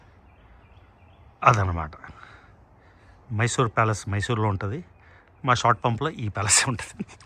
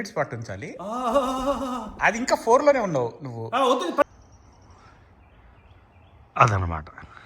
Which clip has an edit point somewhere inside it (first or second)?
second